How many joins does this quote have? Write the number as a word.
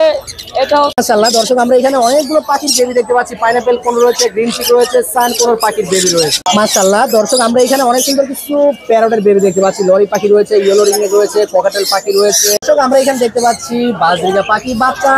three